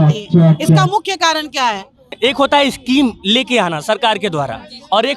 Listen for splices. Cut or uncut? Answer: cut